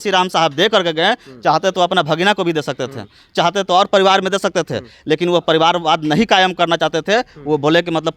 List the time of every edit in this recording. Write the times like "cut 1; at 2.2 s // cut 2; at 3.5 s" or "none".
none